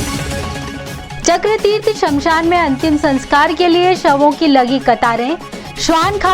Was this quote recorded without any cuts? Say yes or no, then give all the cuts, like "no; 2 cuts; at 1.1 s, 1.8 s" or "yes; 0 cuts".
no; 1 cut; at 1.1 s